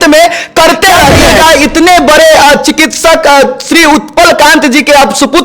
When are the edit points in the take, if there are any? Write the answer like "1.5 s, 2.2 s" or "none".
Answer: 1.3 s